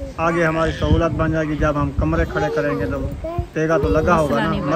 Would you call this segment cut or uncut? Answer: uncut